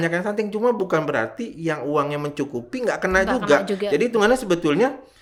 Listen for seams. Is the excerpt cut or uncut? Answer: uncut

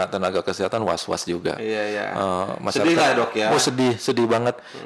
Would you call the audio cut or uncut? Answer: uncut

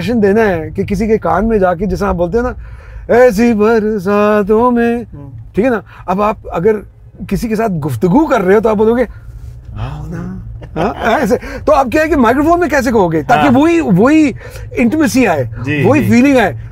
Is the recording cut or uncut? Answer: uncut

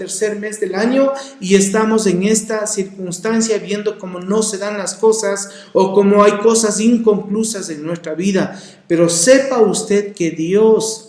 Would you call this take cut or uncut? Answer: uncut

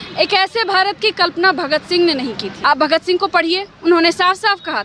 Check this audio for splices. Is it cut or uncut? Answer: cut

